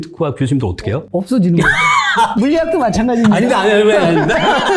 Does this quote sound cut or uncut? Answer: uncut